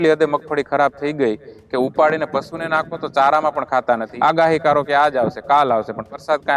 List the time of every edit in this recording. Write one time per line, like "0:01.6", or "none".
0:04.1